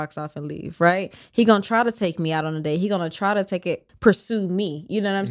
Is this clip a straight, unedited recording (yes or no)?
no